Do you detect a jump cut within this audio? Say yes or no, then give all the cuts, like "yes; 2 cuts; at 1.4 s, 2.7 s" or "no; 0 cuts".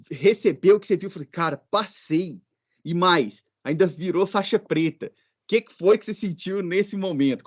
no; 0 cuts